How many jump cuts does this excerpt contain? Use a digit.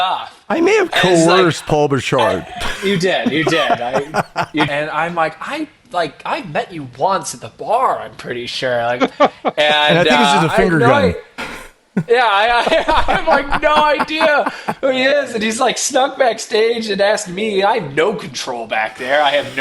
1